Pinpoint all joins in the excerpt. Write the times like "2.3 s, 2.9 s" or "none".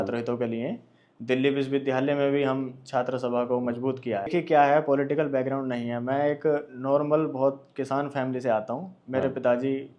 4.3 s